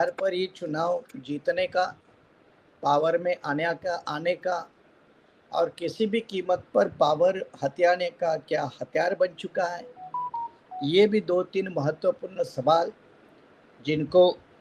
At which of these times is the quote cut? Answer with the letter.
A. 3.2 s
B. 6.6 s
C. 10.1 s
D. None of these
D